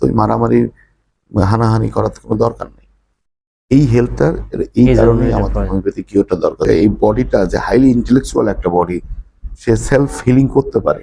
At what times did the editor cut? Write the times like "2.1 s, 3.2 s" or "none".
6.6 s